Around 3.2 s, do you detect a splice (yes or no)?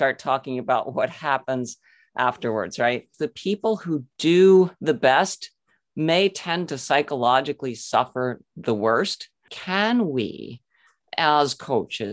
yes